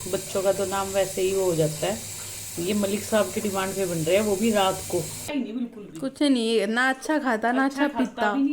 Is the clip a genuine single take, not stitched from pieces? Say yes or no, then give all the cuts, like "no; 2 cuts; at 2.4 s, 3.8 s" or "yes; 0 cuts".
no; 1 cut; at 5.3 s